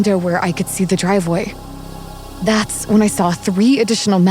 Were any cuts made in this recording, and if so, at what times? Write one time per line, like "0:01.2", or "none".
none

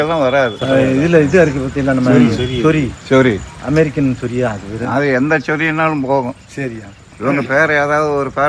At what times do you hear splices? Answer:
none

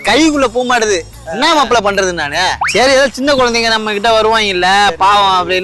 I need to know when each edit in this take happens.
0:02.6

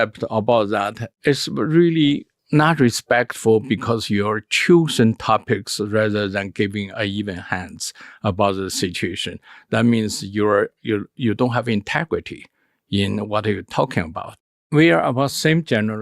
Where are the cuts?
0:14.3

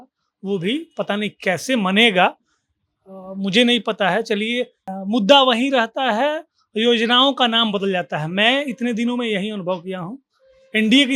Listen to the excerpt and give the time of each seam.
0:04.9

